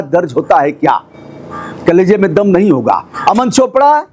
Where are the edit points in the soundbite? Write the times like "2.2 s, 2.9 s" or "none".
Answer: none